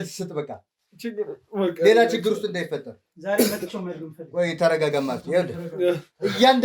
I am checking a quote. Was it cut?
no; 0 cuts

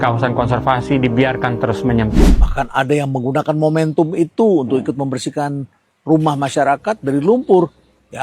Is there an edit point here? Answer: yes; 1 cut; at 2.3 s

